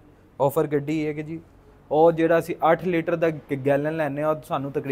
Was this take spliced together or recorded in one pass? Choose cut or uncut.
uncut